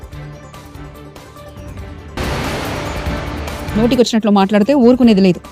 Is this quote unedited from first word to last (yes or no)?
no